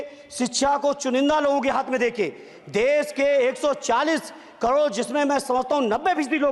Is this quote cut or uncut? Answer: uncut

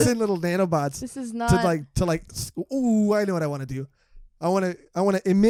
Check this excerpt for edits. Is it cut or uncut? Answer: uncut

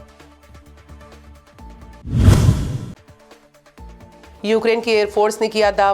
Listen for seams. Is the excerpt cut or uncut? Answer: cut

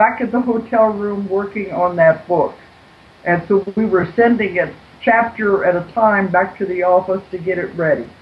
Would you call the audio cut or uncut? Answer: uncut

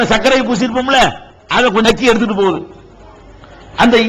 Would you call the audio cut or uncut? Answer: cut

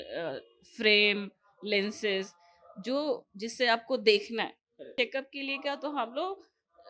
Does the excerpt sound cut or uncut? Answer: cut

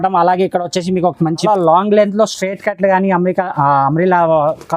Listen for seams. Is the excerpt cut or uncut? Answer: cut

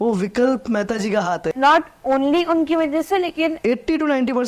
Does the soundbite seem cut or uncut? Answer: cut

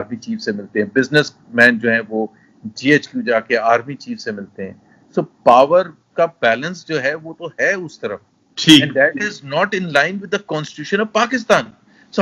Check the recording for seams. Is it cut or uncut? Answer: uncut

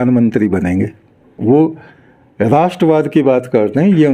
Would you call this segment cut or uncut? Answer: cut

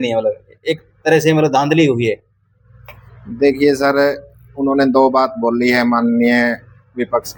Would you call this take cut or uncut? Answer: uncut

